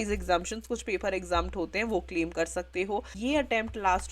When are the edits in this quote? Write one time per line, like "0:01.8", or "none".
0:03.1